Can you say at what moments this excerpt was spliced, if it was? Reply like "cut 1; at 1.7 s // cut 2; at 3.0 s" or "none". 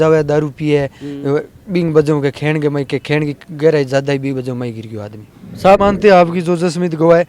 cut 1; at 5.8 s